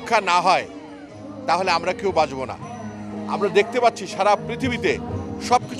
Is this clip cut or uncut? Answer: uncut